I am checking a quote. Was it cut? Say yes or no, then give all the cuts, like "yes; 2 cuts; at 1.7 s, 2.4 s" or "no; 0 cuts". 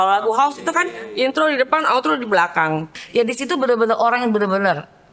yes; 1 cut; at 3.0 s